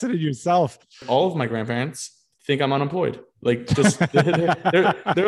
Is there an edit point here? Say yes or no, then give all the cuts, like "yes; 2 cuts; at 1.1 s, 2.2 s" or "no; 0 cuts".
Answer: yes; 1 cut; at 1.0 s